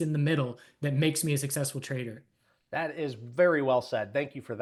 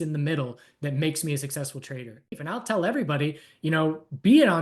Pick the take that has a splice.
second; 1 cut; at 2.4 s

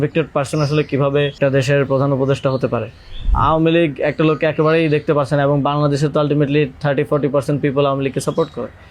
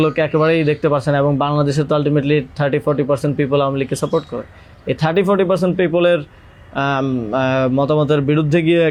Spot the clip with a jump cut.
first; 2 cuts; at 1.4 s, 3.3 s

